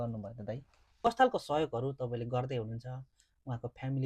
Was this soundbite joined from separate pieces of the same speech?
yes; 1 cut; at 1.1 s

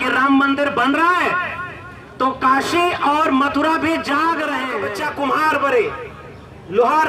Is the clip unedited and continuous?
no; 1 cut; at 4.8 s

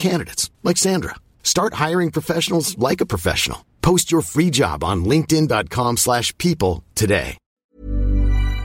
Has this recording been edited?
yes; 1 cut; at 7.6 s

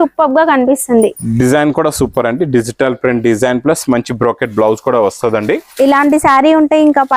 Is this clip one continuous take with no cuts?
yes; 0 cuts

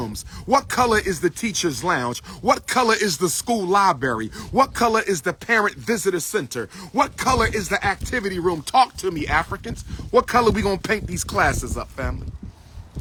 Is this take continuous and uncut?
yes; 0 cuts

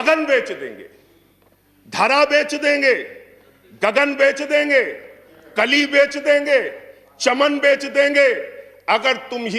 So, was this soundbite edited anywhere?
no; 0 cuts

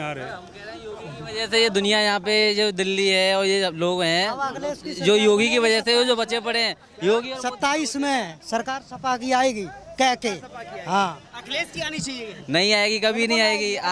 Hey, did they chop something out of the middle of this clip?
no; 0 cuts

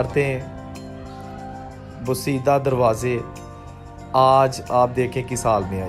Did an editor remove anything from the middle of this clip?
no; 0 cuts

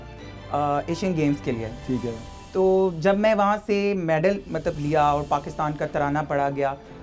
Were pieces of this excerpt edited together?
no; 0 cuts

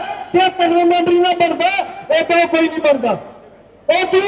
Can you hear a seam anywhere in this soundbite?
no; 0 cuts

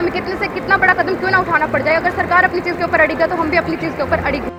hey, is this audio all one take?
yes; 0 cuts

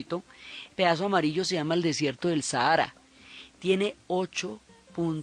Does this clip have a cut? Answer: yes; 1 cut; at 4.0 s

